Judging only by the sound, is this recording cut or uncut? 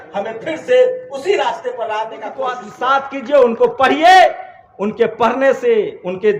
cut